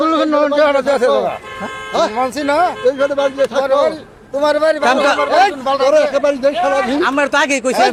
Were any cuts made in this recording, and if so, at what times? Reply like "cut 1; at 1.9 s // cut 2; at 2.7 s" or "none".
none